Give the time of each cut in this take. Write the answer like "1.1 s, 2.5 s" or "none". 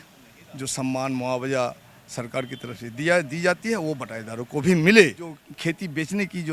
5.4 s